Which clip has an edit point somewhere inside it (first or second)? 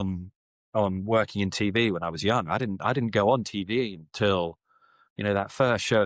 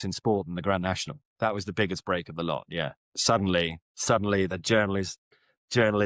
second